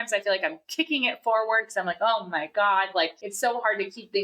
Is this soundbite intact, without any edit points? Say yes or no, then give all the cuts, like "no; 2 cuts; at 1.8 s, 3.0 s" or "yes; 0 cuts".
no; 1 cut; at 3.2 s